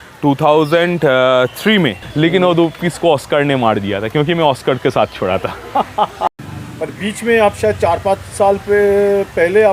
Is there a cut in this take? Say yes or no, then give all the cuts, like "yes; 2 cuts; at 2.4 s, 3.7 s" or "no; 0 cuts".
yes; 2 cuts; at 2.0 s, 6.7 s